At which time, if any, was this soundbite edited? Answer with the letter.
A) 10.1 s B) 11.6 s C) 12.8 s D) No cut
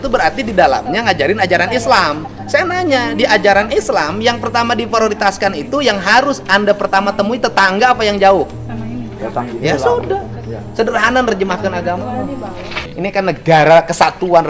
C